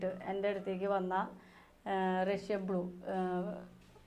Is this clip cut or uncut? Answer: uncut